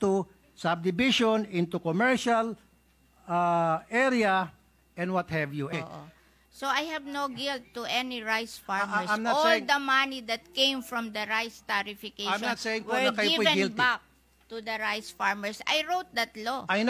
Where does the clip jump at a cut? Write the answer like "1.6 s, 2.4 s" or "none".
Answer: 5.7 s